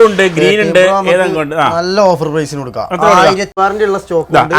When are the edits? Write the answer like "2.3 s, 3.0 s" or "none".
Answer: 3.5 s